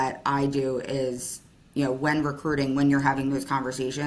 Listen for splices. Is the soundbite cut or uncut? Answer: uncut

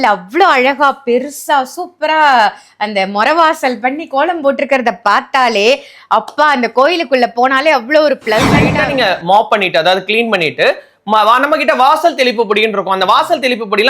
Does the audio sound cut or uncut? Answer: cut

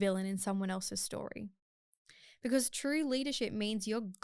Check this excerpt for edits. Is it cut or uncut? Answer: uncut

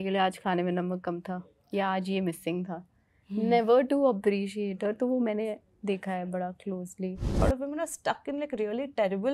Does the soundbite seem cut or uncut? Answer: cut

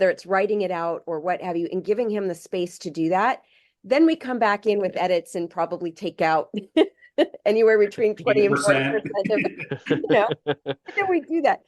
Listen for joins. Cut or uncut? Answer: uncut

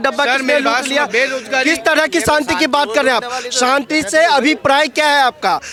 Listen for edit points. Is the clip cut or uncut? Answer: uncut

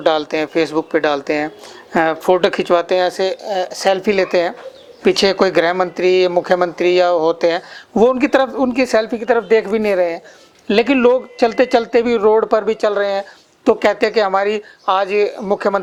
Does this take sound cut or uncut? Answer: uncut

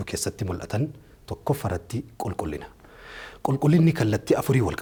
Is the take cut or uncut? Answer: uncut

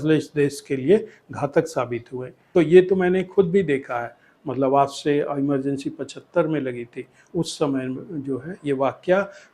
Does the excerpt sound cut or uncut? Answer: cut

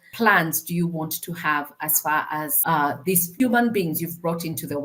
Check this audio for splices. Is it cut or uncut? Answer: uncut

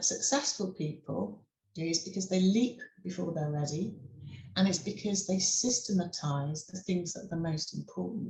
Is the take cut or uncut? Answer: uncut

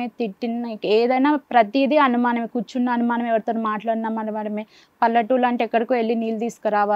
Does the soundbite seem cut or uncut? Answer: uncut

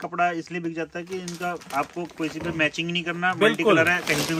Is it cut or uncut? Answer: uncut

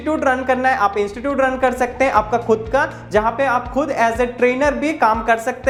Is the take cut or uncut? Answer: uncut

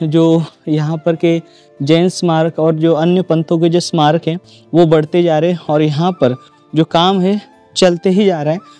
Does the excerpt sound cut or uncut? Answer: uncut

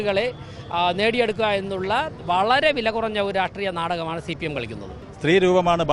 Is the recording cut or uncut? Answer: cut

